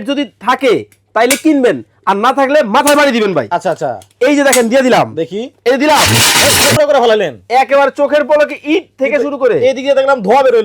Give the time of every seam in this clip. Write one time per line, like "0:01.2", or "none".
0:06.7